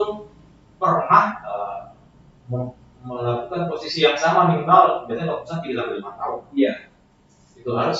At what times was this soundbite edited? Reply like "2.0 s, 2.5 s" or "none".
none